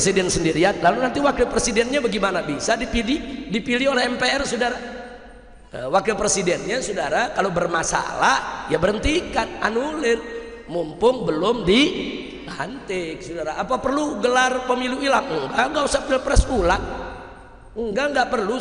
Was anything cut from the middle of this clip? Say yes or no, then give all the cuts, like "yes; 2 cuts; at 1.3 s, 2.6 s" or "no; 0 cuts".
no; 0 cuts